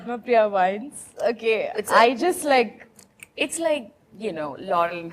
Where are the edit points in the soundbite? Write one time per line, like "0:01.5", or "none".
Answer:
none

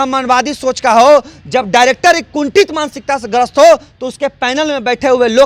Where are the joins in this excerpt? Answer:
none

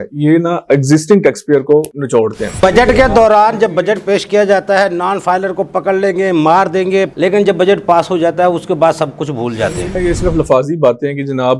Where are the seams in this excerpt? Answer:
0:02.6
0:07.1
0:09.9

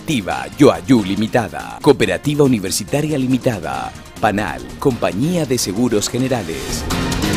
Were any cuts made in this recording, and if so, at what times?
none

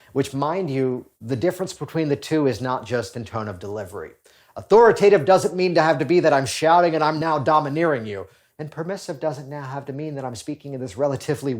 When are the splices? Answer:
0:07.2

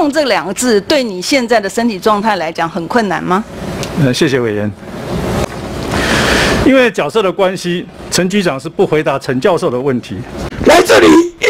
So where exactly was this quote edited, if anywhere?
0:05.4
0:10.4

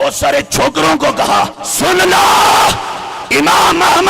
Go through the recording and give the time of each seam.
0:01.6

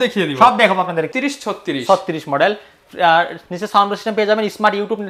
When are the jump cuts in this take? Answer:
0:01.1

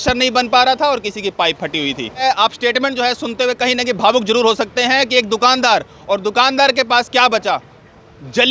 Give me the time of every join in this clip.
0:02.2

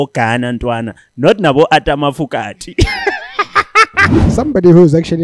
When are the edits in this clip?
0:04.1

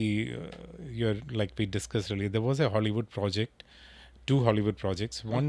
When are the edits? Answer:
none

